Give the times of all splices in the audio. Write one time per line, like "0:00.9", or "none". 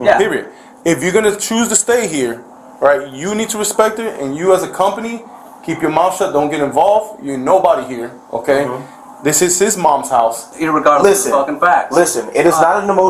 0:10.5